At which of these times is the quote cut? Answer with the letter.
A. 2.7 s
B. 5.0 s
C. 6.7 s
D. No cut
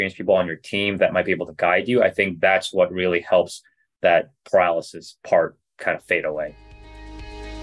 C